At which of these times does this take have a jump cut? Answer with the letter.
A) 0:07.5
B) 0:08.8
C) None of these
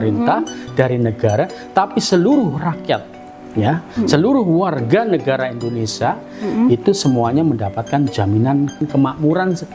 B